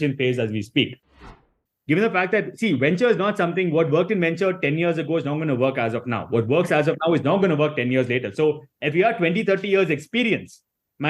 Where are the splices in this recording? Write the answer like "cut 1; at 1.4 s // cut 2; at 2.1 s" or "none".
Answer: cut 1; at 1.3 s